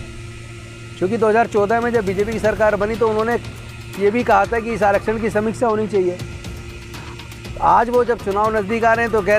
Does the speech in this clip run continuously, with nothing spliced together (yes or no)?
yes